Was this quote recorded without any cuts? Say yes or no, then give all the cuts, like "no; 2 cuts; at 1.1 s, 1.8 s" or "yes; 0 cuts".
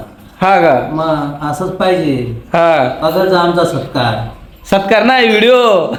yes; 0 cuts